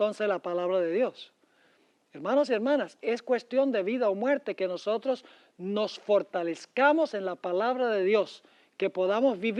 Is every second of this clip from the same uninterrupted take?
yes; 0 cuts

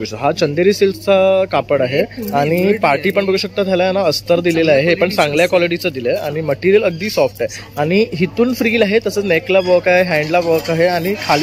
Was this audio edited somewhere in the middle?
no; 0 cuts

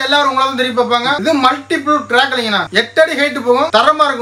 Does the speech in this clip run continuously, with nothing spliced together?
no; 1 cut; at 1.2 s

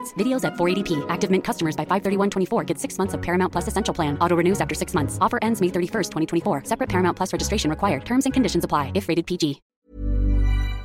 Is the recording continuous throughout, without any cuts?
no; 1 cut; at 9.7 s

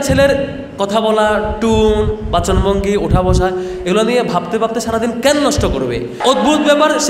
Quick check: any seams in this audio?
yes; 1 cut; at 6.2 s

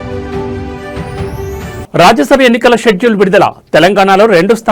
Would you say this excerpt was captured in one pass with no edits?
no; 1 cut; at 1.8 s

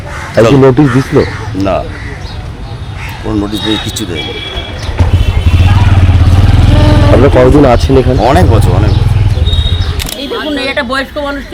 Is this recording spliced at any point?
yes; 1 cut; at 10.1 s

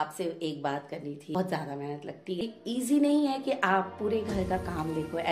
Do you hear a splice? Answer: yes; 2 cuts; at 1.3 s, 2.4 s

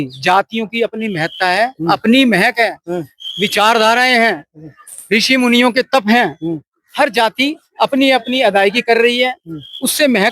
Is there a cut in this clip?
no; 0 cuts

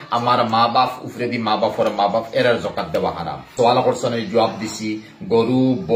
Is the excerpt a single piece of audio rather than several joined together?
no; 1 cut; at 3.5 s

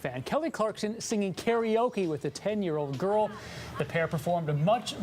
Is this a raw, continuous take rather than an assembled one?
yes; 0 cuts

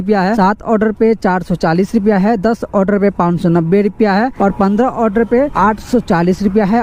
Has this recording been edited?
no; 0 cuts

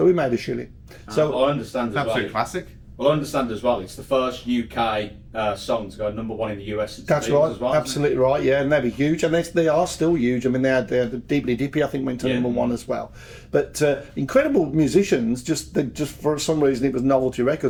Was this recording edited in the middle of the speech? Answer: no; 0 cuts

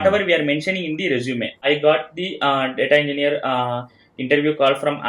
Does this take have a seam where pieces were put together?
yes; 1 cut; at 1.6 s

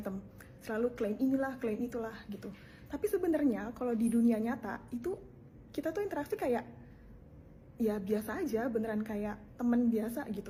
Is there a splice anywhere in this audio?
no; 0 cuts

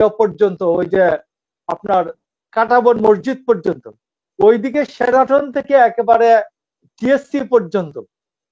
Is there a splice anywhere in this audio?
no; 0 cuts

